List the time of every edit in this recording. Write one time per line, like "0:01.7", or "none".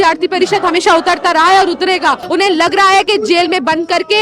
0:02.2